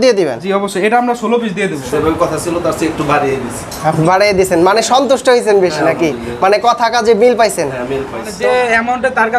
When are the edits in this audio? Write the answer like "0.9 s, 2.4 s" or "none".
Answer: 1.8 s, 8.2 s